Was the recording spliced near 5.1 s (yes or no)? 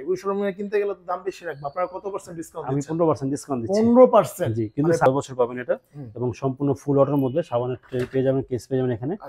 yes